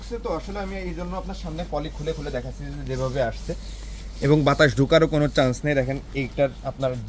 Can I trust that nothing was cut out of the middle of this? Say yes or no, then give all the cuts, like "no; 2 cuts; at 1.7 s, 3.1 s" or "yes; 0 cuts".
yes; 0 cuts